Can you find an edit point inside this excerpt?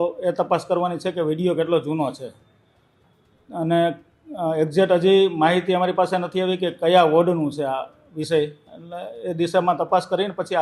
no; 0 cuts

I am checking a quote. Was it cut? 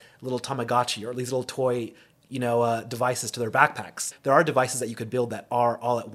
yes; 1 cut; at 4.1 s

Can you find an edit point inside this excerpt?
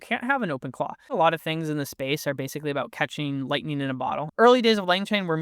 yes; 2 cuts; at 1.0 s, 4.3 s

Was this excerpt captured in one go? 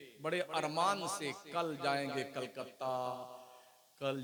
yes; 0 cuts

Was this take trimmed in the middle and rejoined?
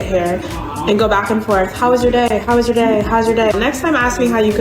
yes; 1 cut; at 3.5 s

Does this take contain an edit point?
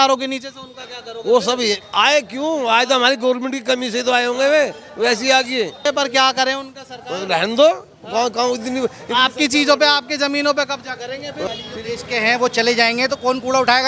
yes; 2 cuts; at 5.8 s, 11.5 s

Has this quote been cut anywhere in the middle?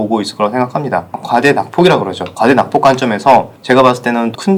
no; 0 cuts

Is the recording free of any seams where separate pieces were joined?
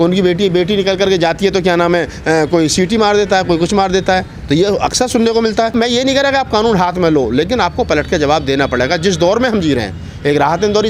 no; 1 cut; at 5.7 s

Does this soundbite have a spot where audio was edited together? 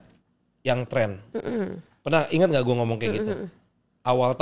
no; 0 cuts

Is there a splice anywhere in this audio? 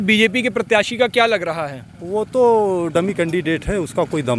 no; 0 cuts

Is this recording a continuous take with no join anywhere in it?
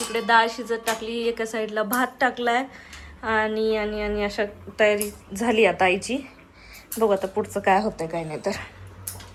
yes; 0 cuts

